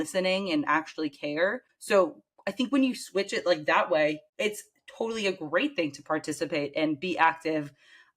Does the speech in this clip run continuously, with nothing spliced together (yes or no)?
no